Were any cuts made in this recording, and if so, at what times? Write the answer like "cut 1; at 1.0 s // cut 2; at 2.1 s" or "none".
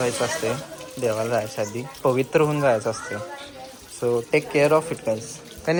none